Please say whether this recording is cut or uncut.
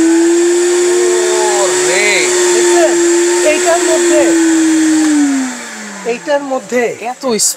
uncut